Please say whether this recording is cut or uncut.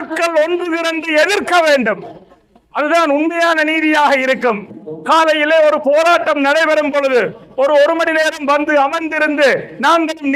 uncut